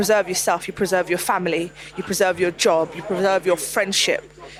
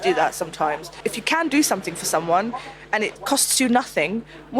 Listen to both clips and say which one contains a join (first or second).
second